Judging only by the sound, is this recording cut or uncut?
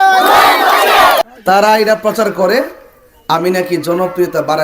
cut